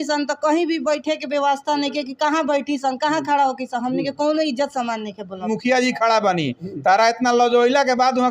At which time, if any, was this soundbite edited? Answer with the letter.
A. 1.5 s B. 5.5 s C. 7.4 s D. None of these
B